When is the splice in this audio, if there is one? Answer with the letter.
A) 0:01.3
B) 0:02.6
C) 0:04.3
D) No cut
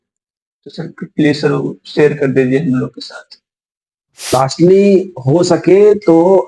C